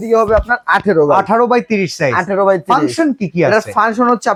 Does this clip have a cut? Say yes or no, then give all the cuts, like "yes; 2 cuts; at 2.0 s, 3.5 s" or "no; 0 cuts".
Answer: no; 0 cuts